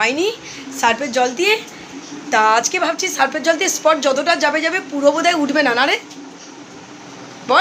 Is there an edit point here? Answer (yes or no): no